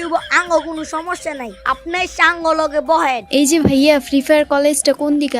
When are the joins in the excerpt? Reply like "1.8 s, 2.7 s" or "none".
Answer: 3.2 s

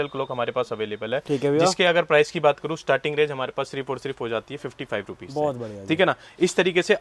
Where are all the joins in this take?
none

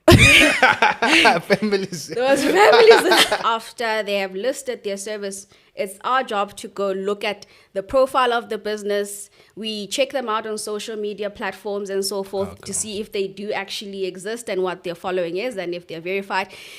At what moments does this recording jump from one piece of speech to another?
3.4 s

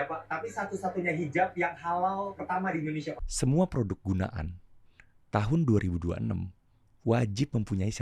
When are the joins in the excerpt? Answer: 3.2 s

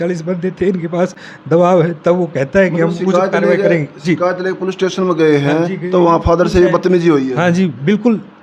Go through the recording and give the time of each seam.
none

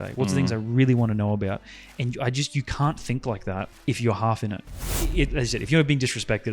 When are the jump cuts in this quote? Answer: 3.7 s, 4.7 s

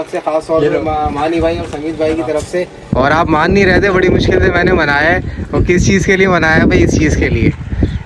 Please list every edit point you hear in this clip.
2.8 s

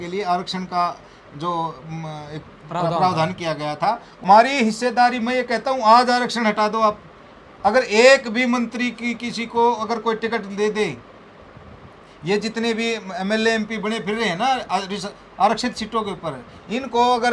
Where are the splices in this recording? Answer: 4.3 s

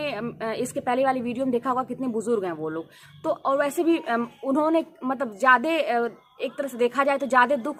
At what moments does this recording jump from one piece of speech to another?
none

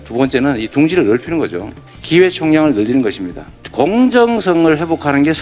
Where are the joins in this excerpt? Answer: 3.5 s

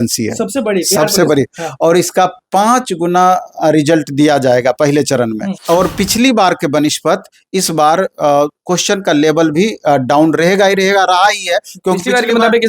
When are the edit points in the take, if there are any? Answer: 5.5 s

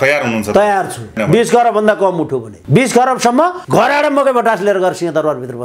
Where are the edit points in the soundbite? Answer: 1.2 s, 2.5 s, 3.6 s

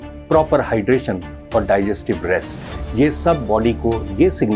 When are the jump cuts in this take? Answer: none

